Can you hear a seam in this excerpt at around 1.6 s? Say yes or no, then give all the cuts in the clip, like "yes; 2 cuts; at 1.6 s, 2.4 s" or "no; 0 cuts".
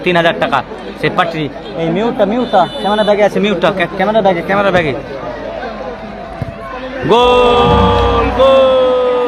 no; 0 cuts